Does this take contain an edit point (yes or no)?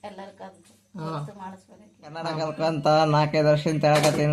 yes